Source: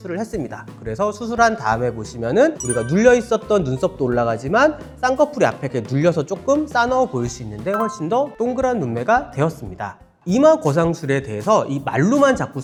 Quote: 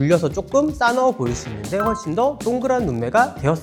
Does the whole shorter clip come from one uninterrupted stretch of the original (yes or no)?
yes